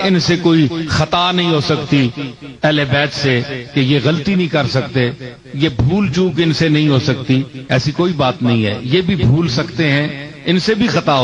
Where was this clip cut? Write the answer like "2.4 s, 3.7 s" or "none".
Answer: none